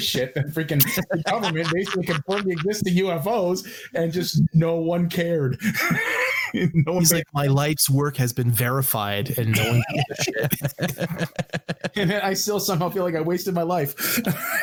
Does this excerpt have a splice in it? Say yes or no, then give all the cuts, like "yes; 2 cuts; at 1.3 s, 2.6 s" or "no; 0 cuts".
no; 0 cuts